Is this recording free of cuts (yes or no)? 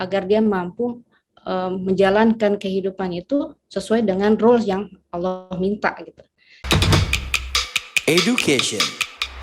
no